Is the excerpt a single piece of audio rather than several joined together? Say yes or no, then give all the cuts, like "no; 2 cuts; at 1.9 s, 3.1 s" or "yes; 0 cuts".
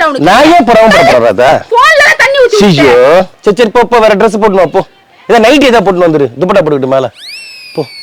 no; 1 cut; at 3.3 s